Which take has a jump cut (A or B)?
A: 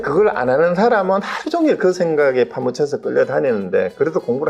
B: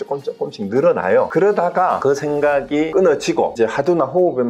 B